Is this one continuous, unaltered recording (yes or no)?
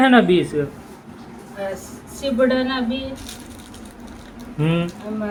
yes